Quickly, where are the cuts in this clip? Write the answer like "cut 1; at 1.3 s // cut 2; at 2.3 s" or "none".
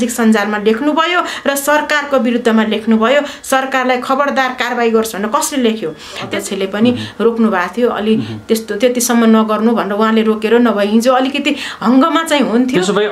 cut 1; at 6.3 s